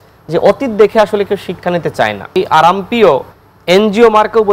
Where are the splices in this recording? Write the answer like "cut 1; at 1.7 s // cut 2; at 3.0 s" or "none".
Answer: cut 1; at 2.3 s